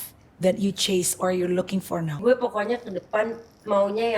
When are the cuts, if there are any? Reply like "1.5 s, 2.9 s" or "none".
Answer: 2.2 s